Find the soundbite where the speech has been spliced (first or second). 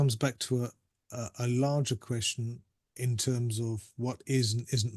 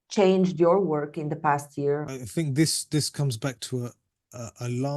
second